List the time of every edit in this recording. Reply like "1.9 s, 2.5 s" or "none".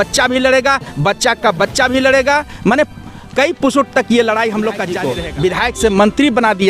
5.0 s